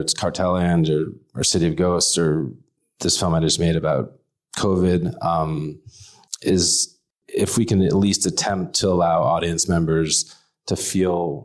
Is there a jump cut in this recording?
yes; 1 cut; at 7.1 s

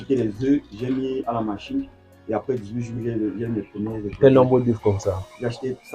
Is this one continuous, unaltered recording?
yes; 0 cuts

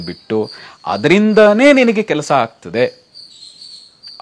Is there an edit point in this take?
no; 0 cuts

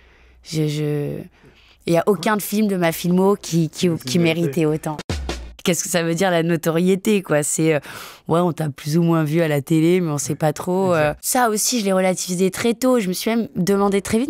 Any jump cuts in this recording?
yes; 2 cuts; at 5.3 s, 11.2 s

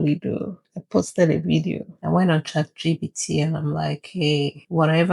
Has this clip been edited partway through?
yes; 1 cut; at 1.9 s

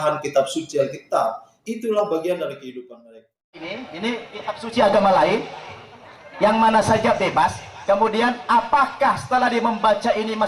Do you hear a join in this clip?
yes; 1 cut; at 3.6 s

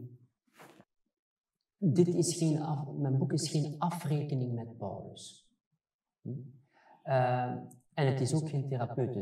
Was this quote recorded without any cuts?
no; 1 cut; at 1.0 s

